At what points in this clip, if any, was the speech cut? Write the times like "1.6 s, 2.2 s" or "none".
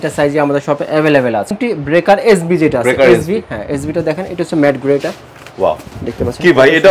1.6 s